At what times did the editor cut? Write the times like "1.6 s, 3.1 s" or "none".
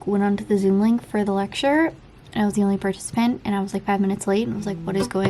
none